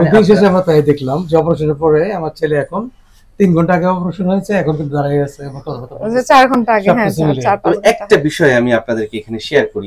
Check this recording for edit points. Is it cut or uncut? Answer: uncut